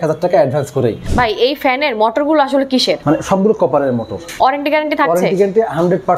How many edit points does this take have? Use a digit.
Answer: 3